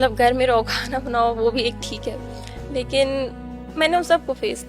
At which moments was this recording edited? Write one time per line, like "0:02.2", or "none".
none